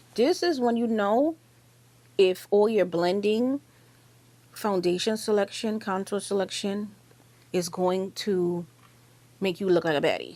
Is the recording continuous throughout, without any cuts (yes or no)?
yes